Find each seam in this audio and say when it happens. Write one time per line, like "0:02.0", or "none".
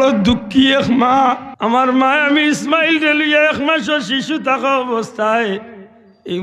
0:01.5

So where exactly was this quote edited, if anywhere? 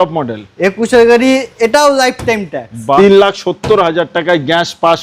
0:03.0

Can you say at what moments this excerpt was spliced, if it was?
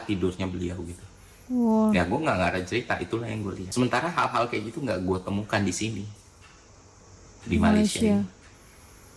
0:03.6

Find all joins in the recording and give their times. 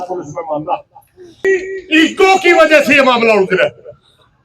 0:01.4

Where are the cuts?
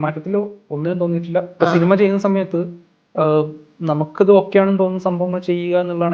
0:01.5

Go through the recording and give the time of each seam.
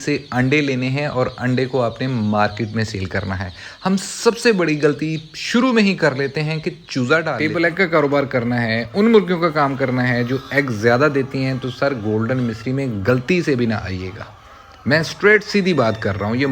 0:07.4

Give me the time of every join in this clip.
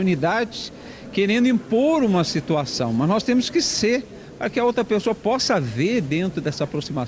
none

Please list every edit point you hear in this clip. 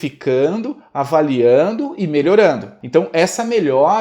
0:02.7

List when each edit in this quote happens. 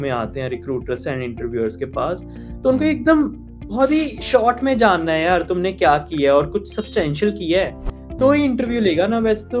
none

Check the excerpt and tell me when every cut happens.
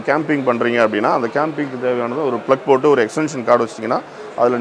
none

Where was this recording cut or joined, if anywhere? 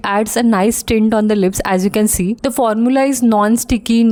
none

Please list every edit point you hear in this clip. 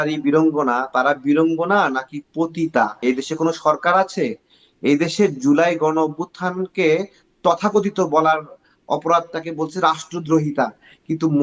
0:03.0

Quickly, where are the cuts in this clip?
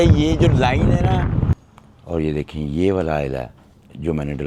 0:01.6

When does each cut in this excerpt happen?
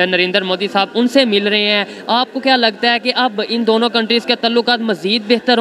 none

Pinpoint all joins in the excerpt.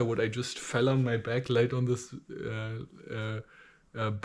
none

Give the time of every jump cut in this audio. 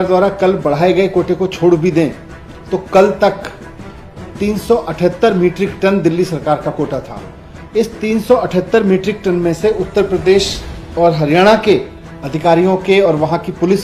none

